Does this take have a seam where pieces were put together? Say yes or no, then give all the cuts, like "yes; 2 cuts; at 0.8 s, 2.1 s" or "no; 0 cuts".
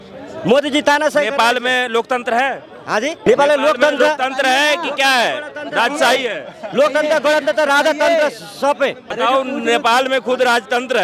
yes; 2 cuts; at 3.2 s, 9.0 s